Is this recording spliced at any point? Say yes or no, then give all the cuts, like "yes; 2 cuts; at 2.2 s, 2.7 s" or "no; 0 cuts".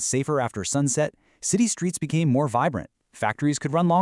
yes; 1 cut; at 0.9 s